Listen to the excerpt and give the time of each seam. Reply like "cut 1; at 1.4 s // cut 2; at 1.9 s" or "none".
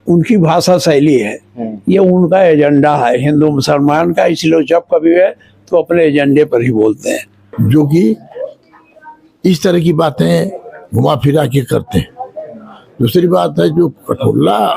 cut 1; at 7.3 s